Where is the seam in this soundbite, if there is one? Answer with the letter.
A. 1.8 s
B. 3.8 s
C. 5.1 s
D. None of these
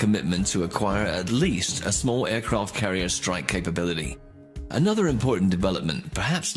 B